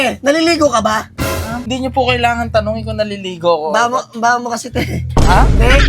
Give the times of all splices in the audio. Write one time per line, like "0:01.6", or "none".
0:01.7

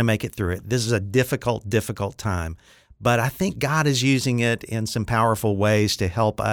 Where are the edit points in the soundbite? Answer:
none

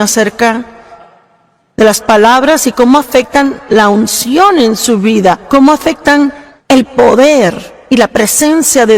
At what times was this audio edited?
0:06.5

